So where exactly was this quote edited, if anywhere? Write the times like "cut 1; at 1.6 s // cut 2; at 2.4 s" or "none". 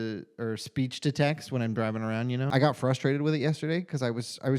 cut 1; at 2.5 s